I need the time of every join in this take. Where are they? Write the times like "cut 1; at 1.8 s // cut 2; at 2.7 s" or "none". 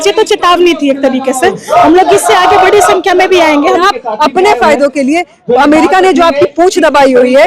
cut 1; at 3.8 s